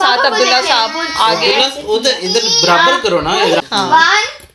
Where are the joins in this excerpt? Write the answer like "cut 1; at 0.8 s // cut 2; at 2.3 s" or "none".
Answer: cut 1; at 3.6 s